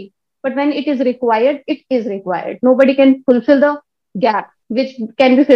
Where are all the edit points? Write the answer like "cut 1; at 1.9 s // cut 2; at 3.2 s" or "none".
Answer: none